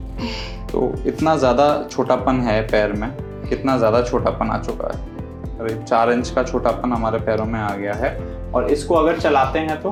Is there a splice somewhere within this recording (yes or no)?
no